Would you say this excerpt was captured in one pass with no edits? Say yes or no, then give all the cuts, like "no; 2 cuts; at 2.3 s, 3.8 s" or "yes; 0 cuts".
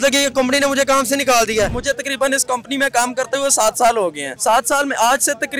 no; 2 cuts; at 1.8 s, 4.3 s